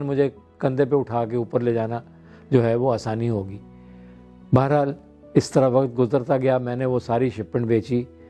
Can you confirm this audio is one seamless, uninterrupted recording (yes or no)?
yes